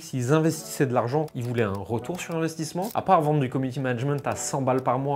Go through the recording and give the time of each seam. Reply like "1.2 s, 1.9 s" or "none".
2.9 s